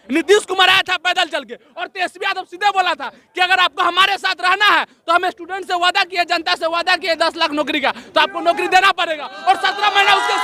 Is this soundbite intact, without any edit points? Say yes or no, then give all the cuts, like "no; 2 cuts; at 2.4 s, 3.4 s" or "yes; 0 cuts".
yes; 0 cuts